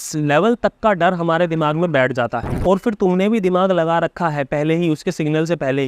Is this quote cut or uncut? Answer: cut